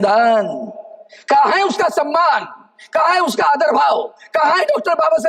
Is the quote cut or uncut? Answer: uncut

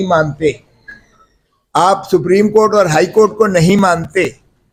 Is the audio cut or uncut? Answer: uncut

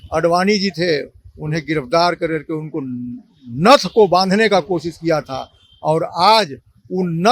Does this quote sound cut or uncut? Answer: uncut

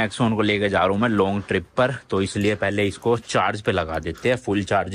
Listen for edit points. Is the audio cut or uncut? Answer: uncut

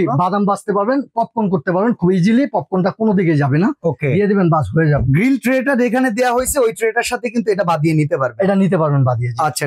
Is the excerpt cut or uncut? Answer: uncut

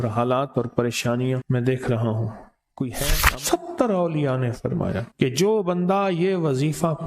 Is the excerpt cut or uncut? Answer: cut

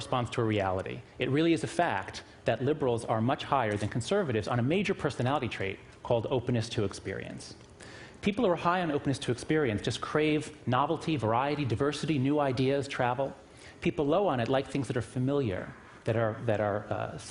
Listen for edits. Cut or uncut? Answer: uncut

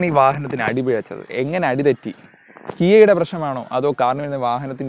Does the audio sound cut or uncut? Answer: uncut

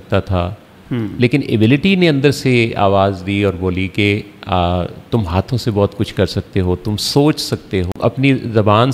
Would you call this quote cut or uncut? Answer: cut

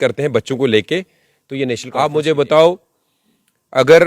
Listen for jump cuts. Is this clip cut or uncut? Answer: cut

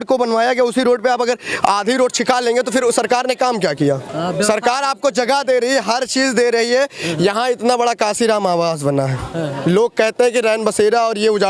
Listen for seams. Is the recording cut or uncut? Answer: cut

